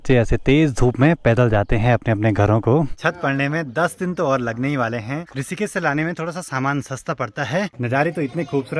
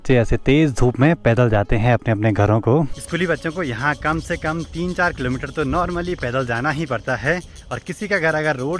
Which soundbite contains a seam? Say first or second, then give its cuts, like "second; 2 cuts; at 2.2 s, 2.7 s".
first; 3 cuts; at 3.0 s, 5.3 s, 7.8 s